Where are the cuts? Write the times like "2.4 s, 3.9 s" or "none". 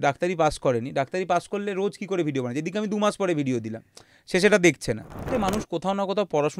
5.3 s